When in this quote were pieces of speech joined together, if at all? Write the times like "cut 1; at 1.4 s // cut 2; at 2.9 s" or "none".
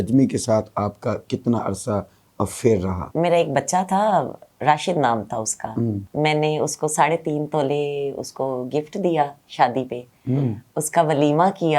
cut 1; at 3.0 s // cut 2; at 6.0 s